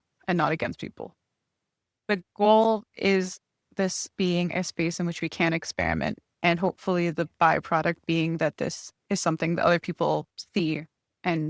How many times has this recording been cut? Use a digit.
3